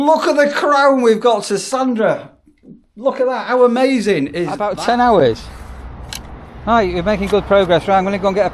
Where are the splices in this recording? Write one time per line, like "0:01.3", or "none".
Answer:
0:04.6